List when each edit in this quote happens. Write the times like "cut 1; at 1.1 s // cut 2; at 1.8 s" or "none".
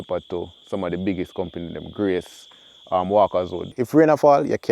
cut 1; at 3.6 s